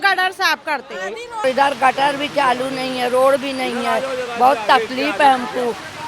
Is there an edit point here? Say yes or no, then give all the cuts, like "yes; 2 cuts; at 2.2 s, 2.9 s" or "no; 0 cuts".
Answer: yes; 1 cut; at 1.4 s